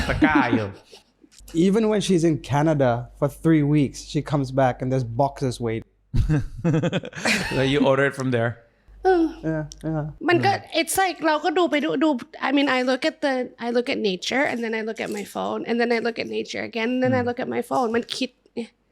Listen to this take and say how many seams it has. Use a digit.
0